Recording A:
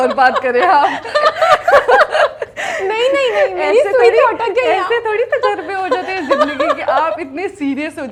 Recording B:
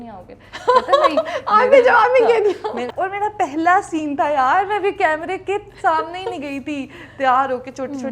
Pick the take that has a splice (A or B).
B